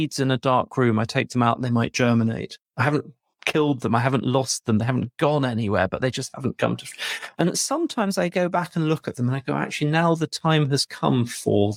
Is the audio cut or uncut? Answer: uncut